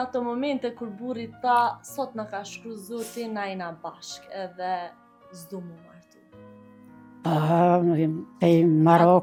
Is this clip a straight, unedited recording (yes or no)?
yes